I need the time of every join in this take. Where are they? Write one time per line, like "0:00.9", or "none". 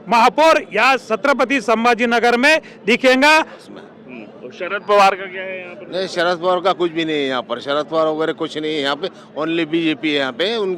0:03.5